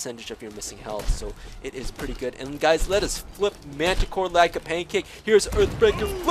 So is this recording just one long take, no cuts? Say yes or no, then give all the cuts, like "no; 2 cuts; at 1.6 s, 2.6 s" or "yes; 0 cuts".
yes; 0 cuts